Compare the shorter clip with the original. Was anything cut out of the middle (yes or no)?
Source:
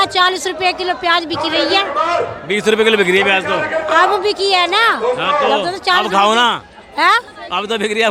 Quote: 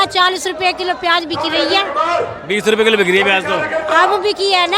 no